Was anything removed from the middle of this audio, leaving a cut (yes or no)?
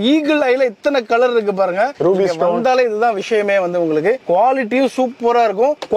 no